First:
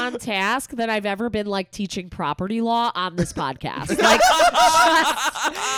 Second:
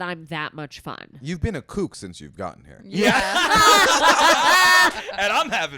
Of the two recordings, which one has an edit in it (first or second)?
second